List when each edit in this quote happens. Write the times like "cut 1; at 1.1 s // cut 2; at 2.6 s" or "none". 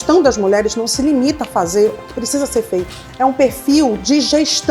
cut 1; at 3.0 s